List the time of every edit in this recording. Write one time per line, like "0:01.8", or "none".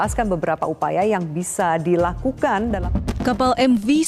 0:02.8